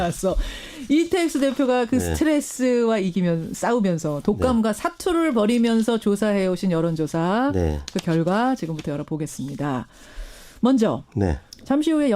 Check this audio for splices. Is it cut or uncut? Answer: cut